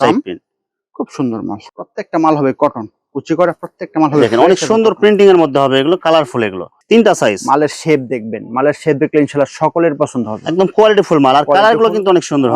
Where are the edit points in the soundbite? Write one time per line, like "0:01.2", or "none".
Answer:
0:01.7
0:06.7